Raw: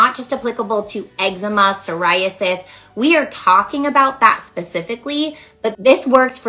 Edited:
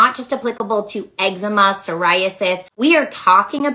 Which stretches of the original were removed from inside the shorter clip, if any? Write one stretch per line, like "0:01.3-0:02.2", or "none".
0:02.7-0:02.9